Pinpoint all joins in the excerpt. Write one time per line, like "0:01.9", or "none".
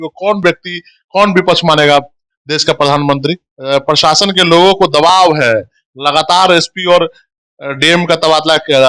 0:03.5